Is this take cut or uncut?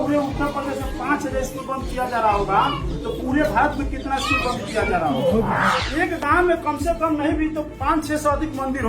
cut